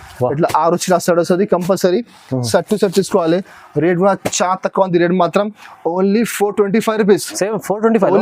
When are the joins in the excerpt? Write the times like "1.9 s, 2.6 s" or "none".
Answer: none